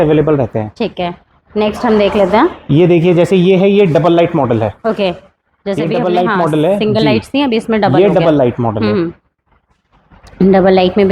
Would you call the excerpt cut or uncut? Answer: uncut